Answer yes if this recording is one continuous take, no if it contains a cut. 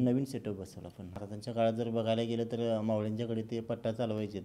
no